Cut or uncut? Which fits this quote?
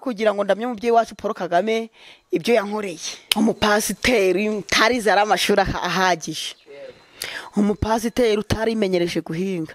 cut